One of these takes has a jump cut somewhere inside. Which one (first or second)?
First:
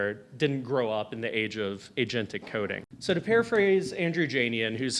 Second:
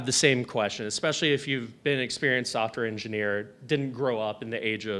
first